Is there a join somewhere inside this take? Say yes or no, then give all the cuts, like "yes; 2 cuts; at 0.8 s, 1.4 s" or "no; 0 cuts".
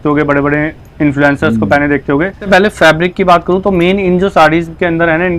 yes; 1 cut; at 2.4 s